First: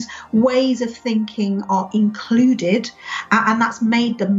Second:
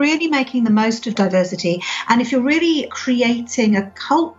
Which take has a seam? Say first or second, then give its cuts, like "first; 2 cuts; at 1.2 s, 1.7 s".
second; 2 cuts; at 1.1 s, 2.9 s